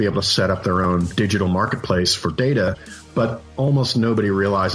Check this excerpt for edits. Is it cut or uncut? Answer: cut